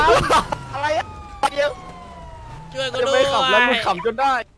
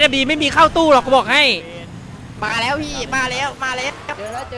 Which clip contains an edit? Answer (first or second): second